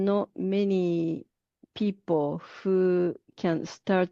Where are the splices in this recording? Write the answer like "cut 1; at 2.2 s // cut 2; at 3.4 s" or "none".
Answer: none